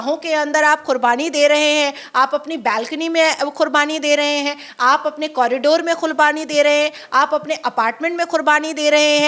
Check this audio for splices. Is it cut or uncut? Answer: uncut